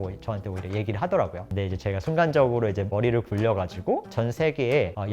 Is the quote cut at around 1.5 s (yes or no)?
yes